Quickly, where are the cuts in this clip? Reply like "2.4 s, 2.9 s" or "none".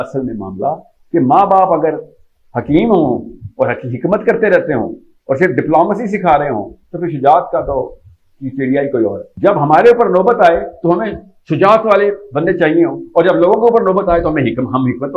9.3 s